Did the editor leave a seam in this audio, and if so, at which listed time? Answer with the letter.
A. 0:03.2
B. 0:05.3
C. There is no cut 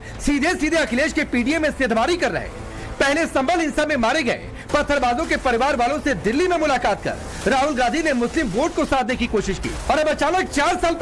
A